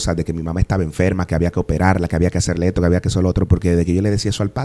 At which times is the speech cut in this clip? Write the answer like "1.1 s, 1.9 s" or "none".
none